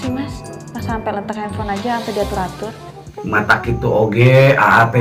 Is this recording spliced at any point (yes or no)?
no